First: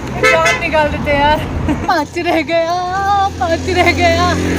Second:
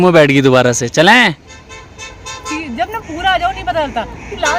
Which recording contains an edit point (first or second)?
first